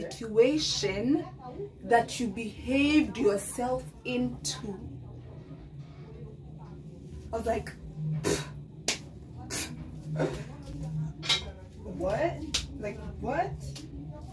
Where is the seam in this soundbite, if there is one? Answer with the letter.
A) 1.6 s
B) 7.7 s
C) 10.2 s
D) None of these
D